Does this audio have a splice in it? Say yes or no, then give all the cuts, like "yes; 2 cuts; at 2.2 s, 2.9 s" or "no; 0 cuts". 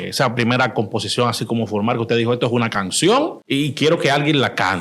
yes; 1 cut; at 3.4 s